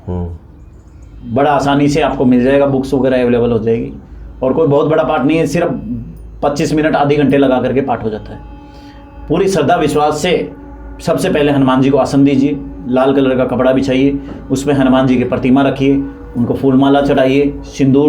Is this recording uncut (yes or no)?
yes